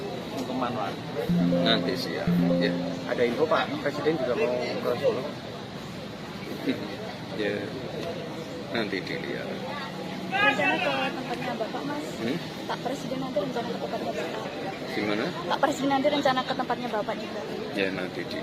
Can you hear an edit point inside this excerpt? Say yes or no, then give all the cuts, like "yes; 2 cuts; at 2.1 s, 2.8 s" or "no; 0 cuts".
no; 0 cuts